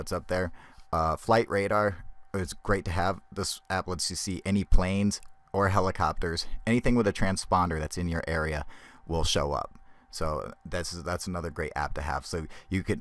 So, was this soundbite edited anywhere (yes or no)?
yes